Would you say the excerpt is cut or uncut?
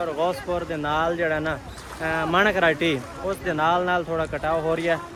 uncut